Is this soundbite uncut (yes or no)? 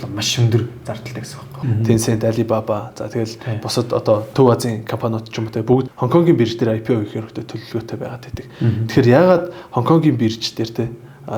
no